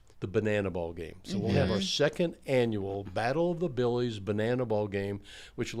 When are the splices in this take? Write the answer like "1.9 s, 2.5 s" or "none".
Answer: none